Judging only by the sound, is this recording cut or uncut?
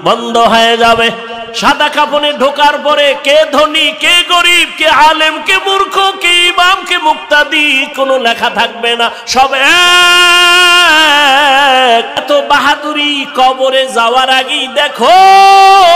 cut